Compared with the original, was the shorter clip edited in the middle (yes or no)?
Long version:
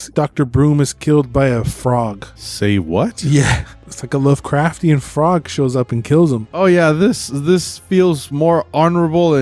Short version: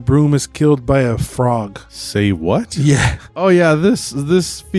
yes